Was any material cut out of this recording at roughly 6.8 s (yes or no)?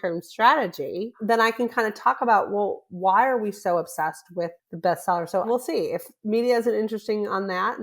no